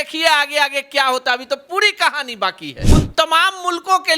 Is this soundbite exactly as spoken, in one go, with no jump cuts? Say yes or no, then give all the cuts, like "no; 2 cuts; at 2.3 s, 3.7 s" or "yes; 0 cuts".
no; 1 cut; at 2.7 s